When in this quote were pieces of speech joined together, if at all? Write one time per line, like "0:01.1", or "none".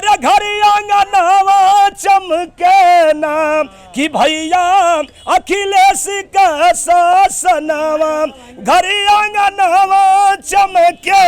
none